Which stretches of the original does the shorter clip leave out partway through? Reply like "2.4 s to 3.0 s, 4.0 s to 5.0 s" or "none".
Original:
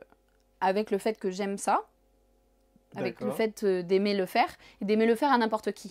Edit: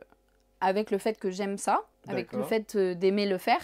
2.0 s to 2.8 s